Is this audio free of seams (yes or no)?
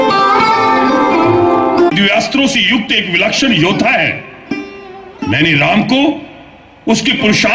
no